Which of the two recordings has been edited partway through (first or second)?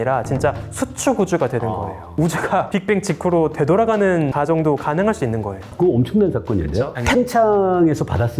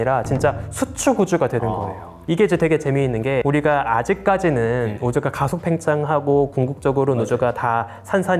first